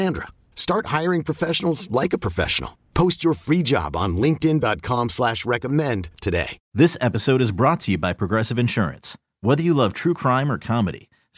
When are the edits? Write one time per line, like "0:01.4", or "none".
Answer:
0:06.6